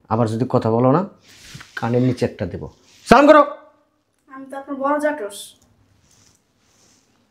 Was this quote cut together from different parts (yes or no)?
no